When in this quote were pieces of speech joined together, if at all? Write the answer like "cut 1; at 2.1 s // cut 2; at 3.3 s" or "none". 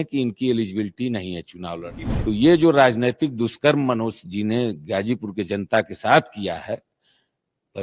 cut 1; at 2.0 s

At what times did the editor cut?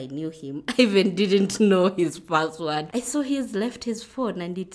cut 1; at 2.9 s

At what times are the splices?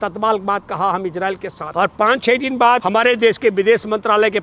cut 1; at 1.6 s // cut 2; at 2.8 s

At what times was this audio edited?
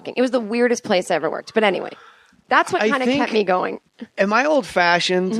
none

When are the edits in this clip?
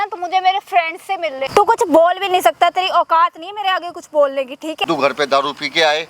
cut 1; at 1.4 s // cut 2; at 4.8 s

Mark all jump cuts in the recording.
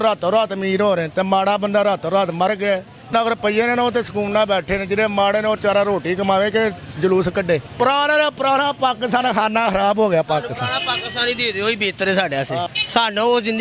cut 1; at 3.1 s // cut 2; at 7.7 s // cut 3; at 12.8 s

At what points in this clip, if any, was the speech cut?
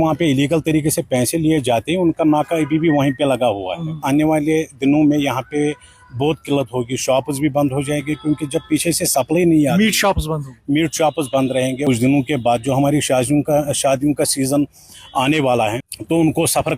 cut 1; at 4.0 s // cut 2; at 11.8 s // cut 3; at 15.8 s

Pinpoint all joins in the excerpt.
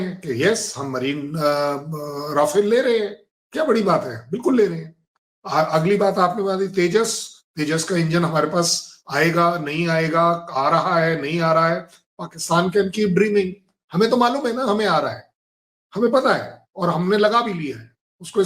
none

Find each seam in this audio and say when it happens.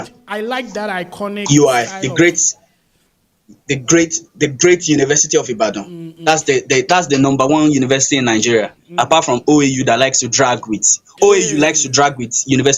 none

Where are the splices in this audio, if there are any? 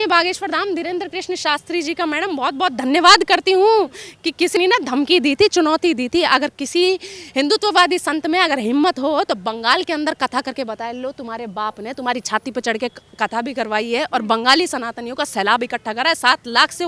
none

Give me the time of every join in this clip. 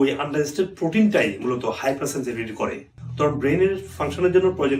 cut 1; at 2.9 s

